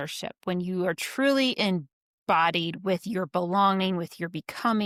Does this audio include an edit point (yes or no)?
no